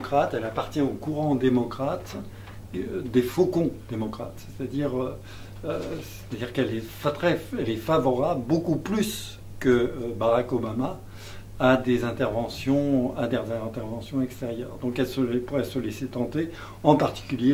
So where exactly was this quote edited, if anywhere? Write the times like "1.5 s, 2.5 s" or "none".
7.8 s